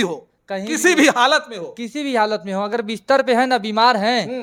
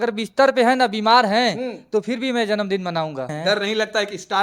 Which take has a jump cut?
second; 1 cut; at 3.3 s

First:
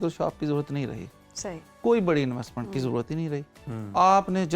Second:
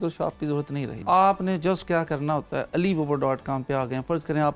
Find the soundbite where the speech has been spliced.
second; 1 cut; at 1.0 s

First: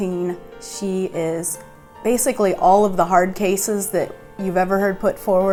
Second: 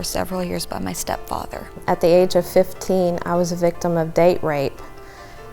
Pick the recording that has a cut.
second; 1 cut; at 1.7 s

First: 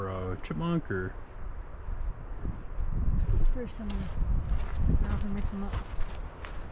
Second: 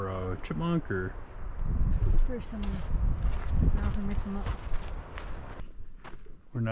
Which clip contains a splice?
second; 2 cuts; at 1.5 s, 5.6 s

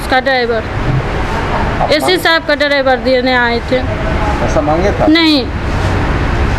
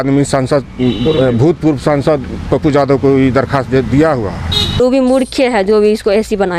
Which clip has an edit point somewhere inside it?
second; 1 cut; at 4.8 s

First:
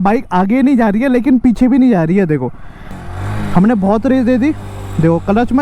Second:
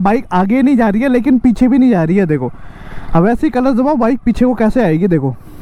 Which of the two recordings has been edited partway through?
first; 1 cut; at 3.0 s

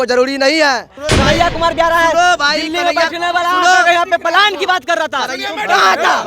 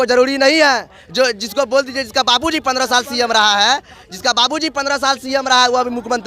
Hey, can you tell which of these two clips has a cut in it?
first; 1 cut; at 1.0 s

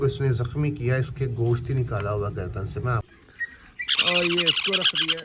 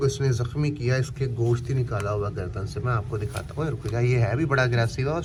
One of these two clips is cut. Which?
first; 1 cut; at 3.0 s

